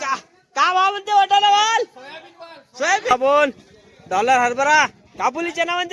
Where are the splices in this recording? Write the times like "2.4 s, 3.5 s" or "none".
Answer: 3.1 s